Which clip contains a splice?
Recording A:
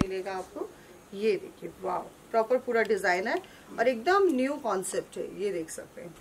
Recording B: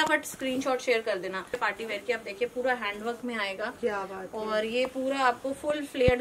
B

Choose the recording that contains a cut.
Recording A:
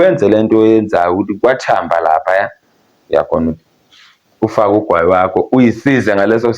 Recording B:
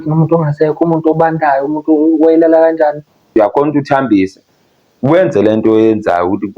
B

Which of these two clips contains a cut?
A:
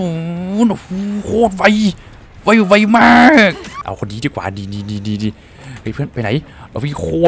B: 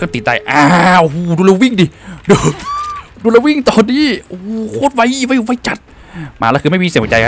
A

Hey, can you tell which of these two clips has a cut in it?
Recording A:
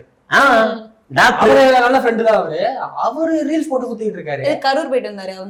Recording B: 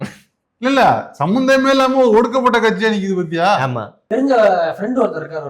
B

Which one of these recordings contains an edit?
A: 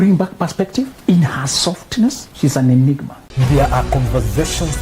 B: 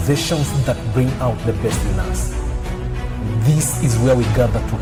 A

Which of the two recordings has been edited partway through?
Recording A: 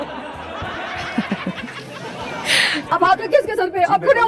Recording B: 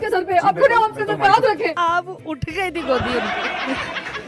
B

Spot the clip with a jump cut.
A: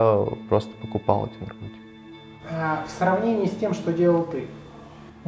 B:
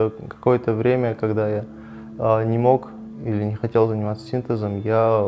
A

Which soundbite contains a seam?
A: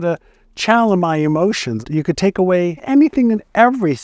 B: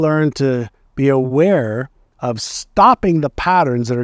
A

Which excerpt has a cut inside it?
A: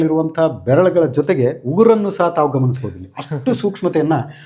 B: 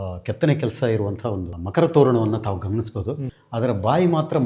B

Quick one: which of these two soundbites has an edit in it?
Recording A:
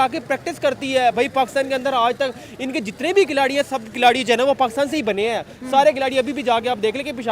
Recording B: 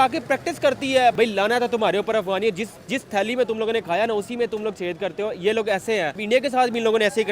B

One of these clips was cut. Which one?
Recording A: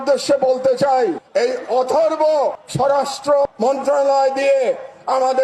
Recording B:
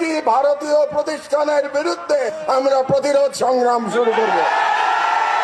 A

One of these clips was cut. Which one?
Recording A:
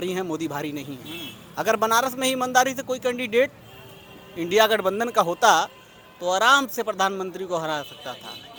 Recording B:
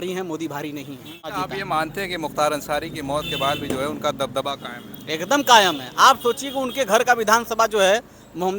B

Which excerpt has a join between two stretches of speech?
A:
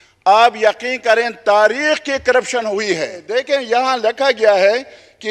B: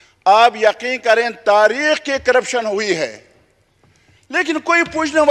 A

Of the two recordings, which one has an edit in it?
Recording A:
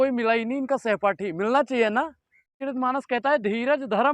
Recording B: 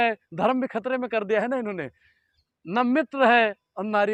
A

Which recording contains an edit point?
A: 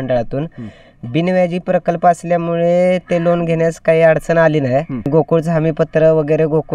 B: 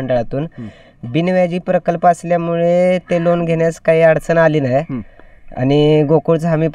A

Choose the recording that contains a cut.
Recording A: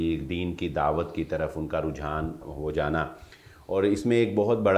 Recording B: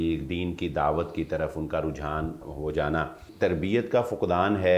B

